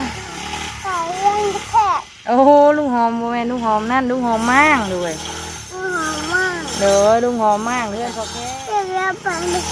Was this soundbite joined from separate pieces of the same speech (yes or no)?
yes